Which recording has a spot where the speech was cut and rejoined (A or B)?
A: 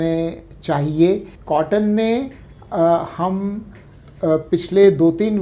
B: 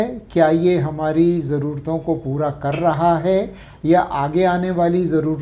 A